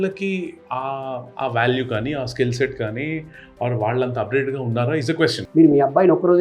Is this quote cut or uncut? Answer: cut